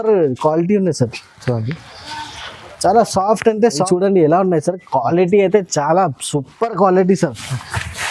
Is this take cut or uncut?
cut